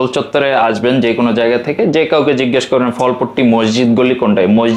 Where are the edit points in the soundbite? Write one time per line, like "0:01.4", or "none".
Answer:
none

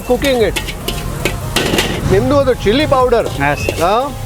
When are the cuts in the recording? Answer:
0:02.0

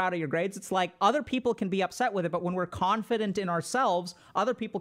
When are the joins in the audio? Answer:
0:00.9

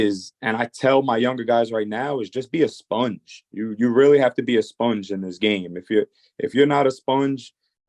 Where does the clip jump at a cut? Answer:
none

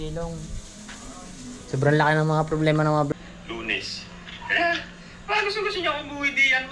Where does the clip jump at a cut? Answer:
0:03.1

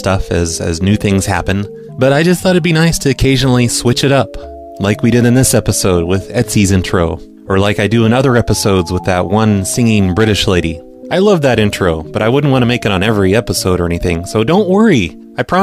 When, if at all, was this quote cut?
0:14.1

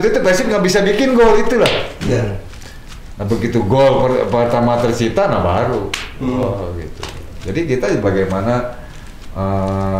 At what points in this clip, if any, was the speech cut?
none

